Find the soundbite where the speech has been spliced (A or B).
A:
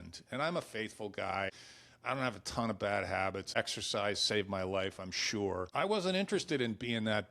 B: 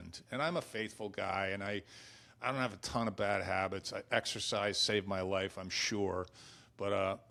A